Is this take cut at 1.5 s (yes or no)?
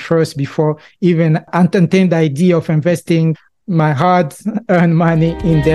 yes